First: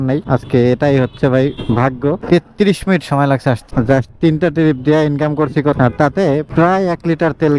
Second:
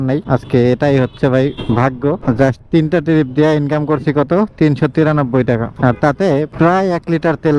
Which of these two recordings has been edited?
first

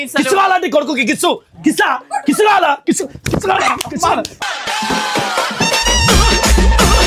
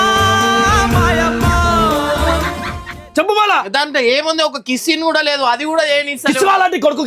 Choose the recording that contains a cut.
second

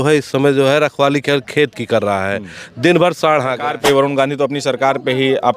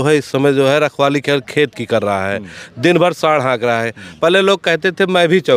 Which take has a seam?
first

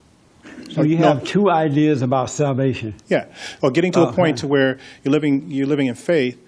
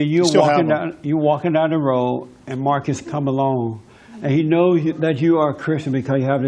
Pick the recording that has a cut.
second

